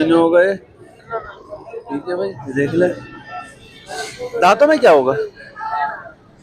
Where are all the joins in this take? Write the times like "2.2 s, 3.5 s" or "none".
2.4 s